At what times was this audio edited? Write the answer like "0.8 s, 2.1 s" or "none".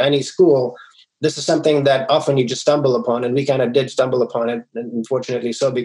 none